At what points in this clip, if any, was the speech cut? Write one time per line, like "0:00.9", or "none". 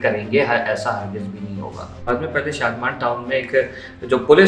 0:02.1